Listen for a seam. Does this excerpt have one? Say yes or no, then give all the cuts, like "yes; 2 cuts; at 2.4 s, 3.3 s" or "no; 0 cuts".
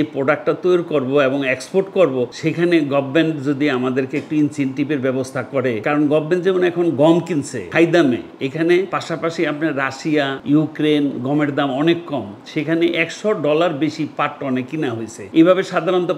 no; 0 cuts